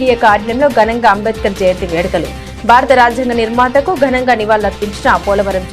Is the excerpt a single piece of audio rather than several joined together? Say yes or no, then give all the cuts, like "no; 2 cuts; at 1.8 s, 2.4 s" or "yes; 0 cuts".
yes; 0 cuts